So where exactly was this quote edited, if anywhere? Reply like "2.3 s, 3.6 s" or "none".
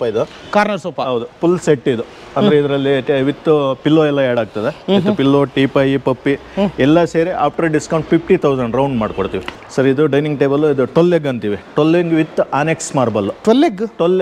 9.5 s